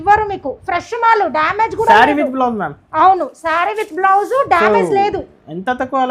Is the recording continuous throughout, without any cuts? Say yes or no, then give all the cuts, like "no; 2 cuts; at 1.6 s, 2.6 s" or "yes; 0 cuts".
yes; 0 cuts